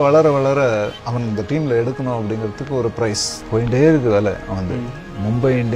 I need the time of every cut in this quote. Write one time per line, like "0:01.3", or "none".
0:01.0
0:03.3